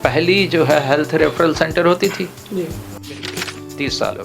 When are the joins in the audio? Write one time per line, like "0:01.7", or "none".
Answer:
0:03.2